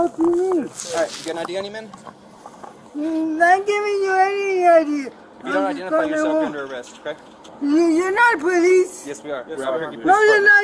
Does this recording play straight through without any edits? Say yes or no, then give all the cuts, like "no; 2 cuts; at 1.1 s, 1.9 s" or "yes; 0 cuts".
yes; 0 cuts